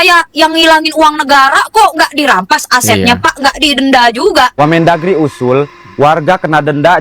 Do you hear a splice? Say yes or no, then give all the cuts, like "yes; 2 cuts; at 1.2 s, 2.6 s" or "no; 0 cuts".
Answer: yes; 1 cut; at 4.5 s